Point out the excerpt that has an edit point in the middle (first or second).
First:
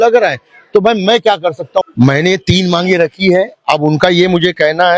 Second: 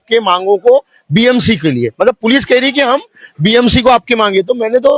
first